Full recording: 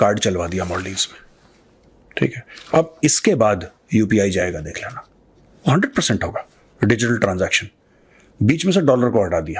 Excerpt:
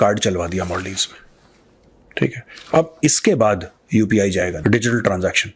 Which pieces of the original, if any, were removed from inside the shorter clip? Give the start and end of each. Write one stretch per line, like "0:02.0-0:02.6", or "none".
0:04.6-0:06.7